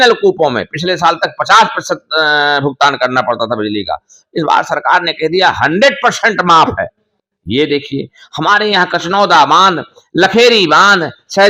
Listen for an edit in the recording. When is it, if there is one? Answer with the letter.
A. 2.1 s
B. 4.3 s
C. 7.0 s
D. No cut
D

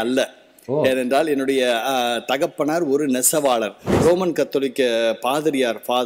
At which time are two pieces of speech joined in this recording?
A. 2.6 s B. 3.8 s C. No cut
B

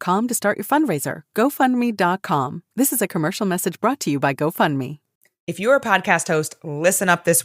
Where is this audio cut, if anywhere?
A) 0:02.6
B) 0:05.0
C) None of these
B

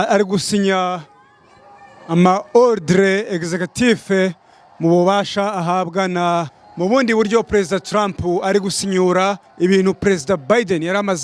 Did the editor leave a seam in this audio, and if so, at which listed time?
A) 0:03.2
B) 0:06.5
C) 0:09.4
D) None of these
B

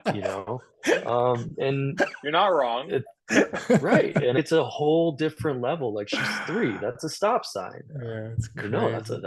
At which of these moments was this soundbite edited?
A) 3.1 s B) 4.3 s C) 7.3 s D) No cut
B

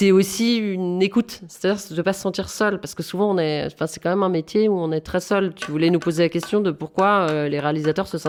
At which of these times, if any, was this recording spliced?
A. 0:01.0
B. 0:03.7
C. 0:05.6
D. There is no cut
D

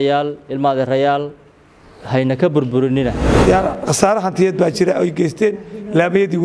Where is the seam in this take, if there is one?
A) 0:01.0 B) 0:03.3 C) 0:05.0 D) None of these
B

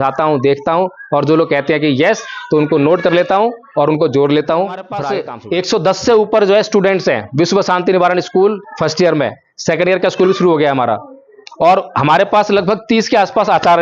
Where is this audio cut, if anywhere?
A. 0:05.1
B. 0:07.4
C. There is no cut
A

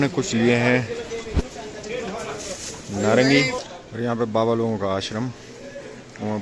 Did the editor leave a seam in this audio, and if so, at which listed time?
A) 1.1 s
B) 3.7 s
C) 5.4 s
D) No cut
B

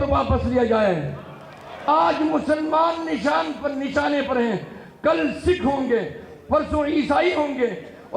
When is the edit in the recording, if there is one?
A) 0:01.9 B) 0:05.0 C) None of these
A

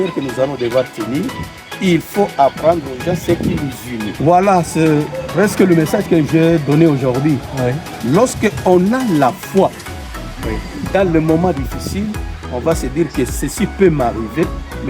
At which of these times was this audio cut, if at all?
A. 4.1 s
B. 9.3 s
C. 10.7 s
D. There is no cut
A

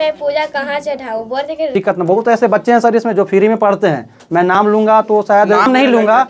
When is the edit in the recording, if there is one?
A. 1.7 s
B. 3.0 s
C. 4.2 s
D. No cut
A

